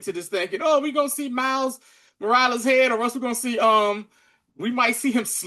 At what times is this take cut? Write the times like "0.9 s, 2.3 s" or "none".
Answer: none